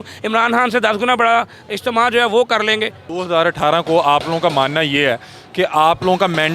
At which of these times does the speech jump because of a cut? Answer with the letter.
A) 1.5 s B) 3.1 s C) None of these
B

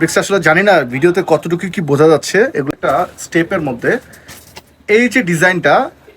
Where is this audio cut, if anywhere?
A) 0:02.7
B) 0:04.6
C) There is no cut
A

